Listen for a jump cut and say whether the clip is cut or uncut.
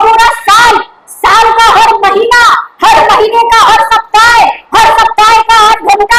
uncut